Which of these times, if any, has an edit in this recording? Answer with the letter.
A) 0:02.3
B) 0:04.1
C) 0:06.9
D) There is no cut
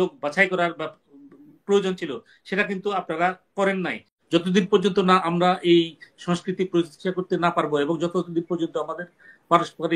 B